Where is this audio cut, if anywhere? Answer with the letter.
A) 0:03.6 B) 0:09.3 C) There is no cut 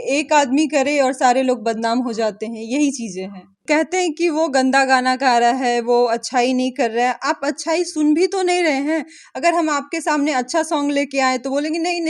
A